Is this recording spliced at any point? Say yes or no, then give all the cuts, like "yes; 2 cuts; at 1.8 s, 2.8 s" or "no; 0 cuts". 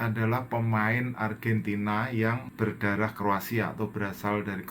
yes; 1 cut; at 2.5 s